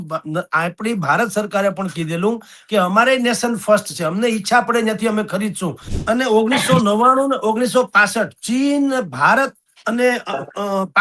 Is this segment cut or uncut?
cut